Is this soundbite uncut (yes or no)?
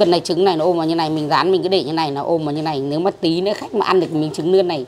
yes